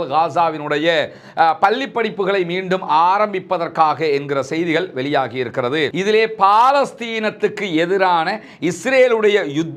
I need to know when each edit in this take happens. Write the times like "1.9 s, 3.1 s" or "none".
5.9 s